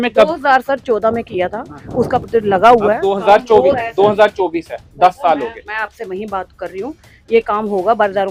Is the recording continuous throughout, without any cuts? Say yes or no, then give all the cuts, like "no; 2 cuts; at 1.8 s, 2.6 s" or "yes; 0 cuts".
yes; 0 cuts